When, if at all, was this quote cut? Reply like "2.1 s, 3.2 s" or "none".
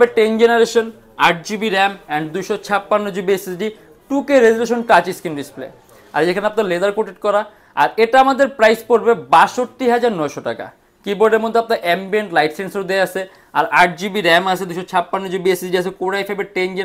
none